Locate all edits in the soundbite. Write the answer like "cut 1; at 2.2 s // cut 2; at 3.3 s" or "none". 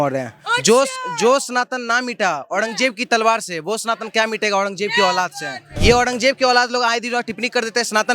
cut 1; at 5.7 s